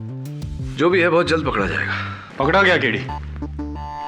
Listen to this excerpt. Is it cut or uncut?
uncut